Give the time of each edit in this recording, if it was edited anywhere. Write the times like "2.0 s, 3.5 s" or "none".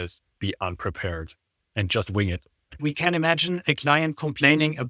2.8 s